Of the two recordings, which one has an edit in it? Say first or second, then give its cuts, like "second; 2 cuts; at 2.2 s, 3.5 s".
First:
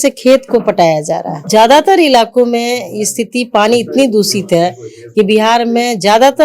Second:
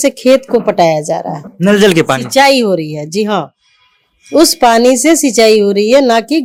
first; 1 cut; at 1.4 s